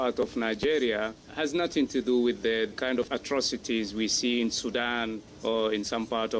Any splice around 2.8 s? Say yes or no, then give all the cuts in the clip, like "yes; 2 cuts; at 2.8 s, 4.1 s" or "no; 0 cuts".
yes; 3 cuts; at 1.2 s, 2.8 s, 5.3 s